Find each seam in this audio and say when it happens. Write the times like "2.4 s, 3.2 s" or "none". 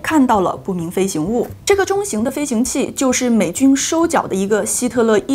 1.5 s